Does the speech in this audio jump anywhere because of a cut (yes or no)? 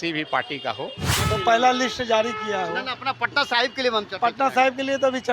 yes